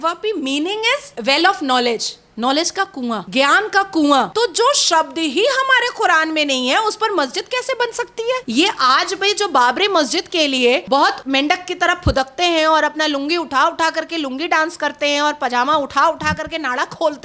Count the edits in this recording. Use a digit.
5